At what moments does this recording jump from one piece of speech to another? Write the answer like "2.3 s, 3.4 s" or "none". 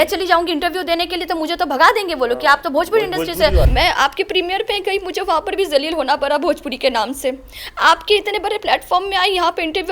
3.7 s